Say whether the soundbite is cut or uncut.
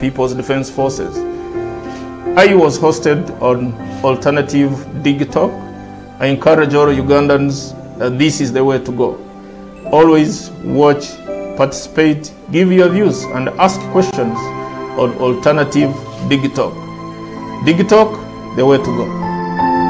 uncut